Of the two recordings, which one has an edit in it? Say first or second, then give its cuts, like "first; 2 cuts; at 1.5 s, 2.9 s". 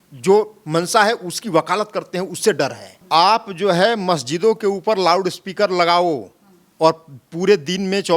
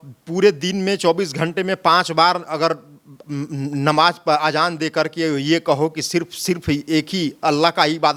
first; 1 cut; at 2.9 s